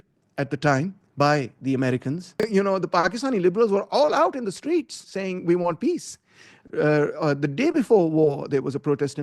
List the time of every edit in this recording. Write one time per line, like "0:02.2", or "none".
0:02.3